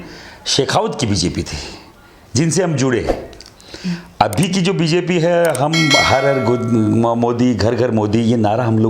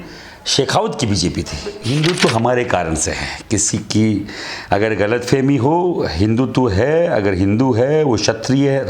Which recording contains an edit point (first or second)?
second